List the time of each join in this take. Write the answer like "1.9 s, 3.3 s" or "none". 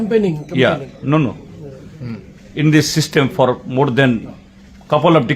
0.9 s